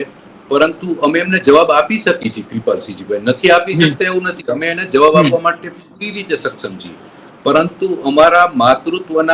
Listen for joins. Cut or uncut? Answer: uncut